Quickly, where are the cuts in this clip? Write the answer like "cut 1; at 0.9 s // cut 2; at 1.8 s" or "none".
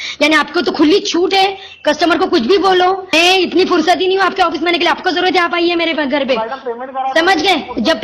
cut 1; at 3.1 s